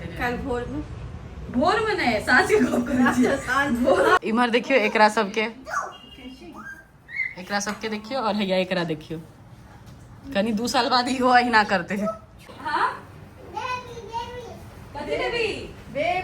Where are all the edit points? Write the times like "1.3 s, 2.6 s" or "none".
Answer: 4.2 s, 12.5 s